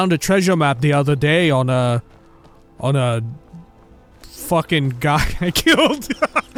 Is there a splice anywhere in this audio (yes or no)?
no